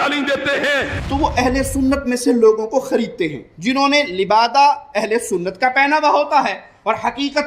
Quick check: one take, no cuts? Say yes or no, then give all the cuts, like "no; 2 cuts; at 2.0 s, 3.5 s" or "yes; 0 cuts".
no; 1 cut; at 1.0 s